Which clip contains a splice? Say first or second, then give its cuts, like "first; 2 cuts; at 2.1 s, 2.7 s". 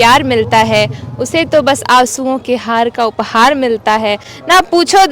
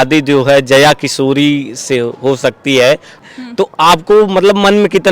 second; 1 cut; at 3.2 s